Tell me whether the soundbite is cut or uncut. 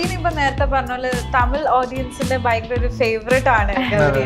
uncut